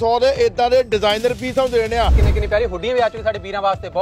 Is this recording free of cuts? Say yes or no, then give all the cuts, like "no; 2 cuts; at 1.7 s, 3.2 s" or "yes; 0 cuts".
no; 1 cut; at 2.3 s